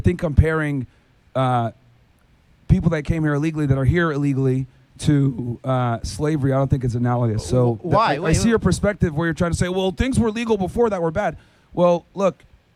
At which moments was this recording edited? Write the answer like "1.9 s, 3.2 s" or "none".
none